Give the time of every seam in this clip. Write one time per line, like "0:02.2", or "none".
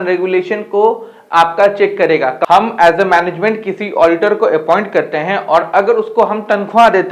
0:02.4